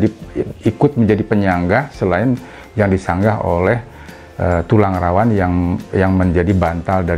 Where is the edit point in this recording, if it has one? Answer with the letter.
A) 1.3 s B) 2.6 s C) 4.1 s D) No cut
D